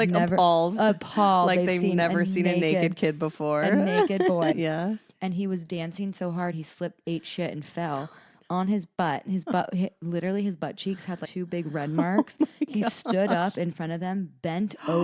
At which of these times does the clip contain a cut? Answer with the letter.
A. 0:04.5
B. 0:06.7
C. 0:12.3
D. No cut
A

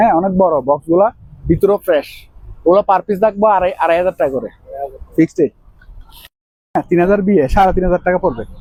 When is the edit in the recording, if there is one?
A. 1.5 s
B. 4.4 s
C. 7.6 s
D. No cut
D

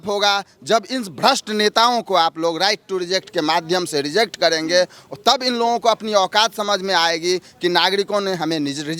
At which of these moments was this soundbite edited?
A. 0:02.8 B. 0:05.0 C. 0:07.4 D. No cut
D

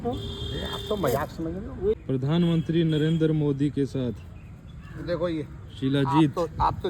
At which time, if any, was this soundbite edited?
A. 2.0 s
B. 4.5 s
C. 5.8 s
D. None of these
A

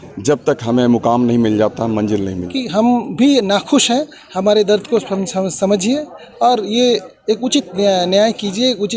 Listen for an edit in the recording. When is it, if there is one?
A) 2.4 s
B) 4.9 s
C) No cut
A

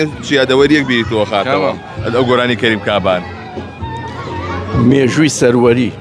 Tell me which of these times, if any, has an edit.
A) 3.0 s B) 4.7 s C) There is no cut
C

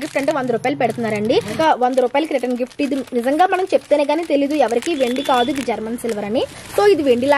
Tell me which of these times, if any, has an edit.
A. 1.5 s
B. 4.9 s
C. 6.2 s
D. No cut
A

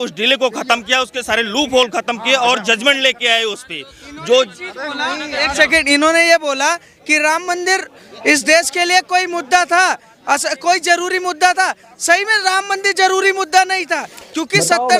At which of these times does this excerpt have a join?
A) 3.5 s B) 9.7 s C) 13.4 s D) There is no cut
D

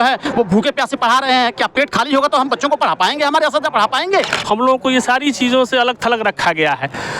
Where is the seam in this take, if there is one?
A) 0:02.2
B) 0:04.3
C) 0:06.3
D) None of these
B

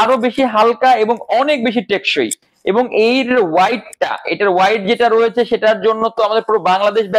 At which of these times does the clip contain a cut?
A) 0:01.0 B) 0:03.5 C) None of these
C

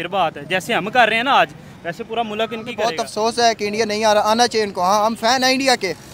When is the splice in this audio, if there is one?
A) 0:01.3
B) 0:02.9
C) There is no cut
B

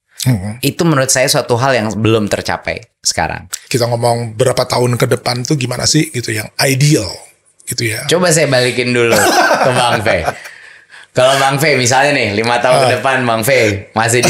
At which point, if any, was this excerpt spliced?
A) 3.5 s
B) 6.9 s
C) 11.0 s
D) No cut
A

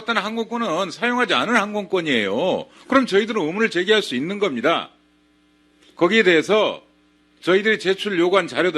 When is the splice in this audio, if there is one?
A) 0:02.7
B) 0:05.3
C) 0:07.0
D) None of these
C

